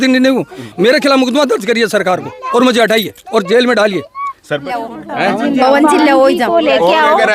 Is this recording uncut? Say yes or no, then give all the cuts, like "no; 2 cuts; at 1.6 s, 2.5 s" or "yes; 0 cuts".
no; 1 cut; at 4.5 s